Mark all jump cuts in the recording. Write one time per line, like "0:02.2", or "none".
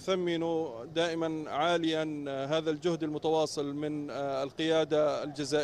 none